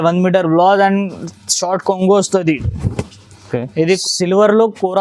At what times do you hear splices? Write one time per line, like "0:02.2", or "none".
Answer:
0:04.0